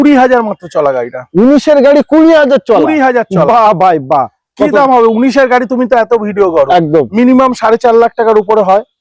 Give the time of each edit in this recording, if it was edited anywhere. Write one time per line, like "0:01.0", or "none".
none